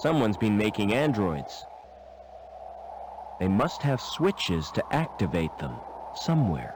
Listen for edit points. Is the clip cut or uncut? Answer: uncut